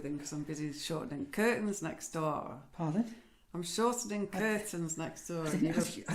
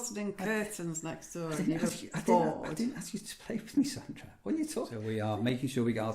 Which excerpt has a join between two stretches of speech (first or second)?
second